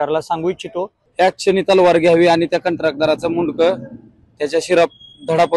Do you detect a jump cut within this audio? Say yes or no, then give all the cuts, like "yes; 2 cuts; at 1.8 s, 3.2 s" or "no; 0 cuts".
yes; 1 cut; at 1.0 s